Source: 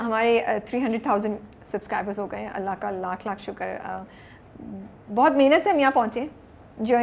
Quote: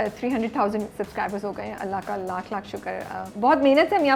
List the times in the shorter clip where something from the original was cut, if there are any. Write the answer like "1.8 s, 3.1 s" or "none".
0.9 s, 3.3 s